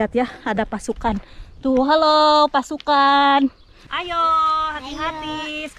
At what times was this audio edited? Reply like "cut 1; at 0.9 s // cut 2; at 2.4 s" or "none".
cut 1; at 4.0 s